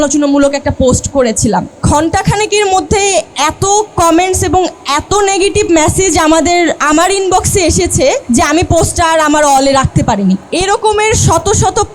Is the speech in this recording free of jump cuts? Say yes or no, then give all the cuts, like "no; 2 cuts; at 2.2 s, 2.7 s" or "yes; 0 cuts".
no; 4 cuts; at 1.8 s, 3.3 s, 8.2 s, 10.5 s